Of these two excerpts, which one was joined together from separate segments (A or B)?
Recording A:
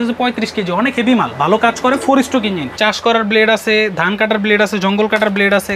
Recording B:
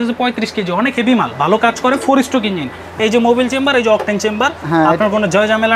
A